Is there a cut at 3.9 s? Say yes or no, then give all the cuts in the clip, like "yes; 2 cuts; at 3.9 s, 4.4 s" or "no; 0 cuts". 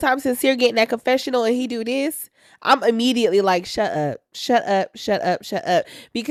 no; 0 cuts